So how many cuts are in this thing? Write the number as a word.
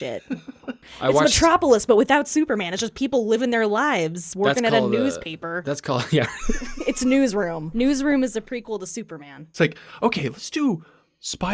two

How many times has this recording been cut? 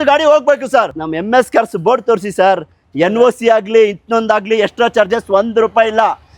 one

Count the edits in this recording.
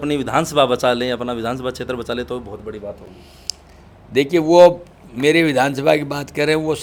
zero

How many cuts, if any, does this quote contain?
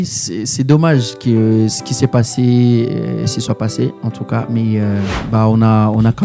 one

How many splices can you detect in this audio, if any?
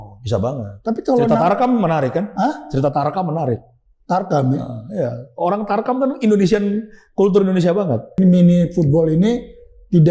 one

